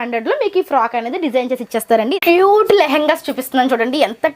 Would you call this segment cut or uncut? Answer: cut